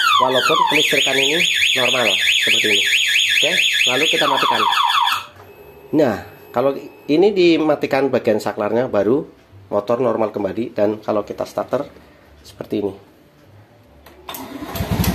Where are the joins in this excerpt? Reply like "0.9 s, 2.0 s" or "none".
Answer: none